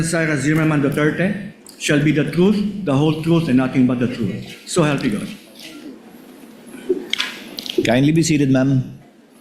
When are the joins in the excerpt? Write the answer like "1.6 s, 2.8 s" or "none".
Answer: none

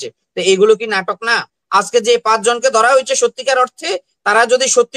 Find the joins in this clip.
1.5 s

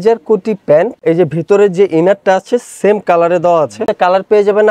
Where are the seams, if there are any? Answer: 1.0 s, 3.9 s

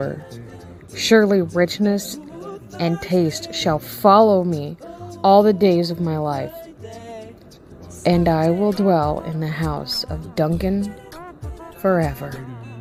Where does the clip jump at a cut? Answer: none

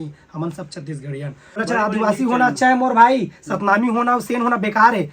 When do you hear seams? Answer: 1.6 s

